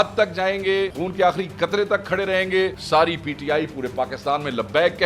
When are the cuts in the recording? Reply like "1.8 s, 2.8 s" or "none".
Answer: 1.0 s, 2.8 s